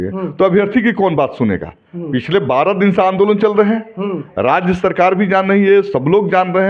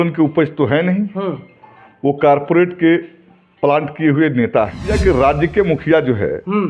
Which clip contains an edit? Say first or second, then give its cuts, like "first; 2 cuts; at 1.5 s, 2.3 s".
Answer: second; 1 cut; at 4.9 s